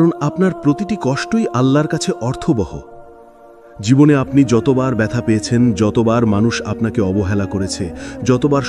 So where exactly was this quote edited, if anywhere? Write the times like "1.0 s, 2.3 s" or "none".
none